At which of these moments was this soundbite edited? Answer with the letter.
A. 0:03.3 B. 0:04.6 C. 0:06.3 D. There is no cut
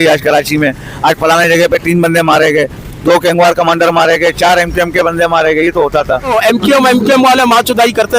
C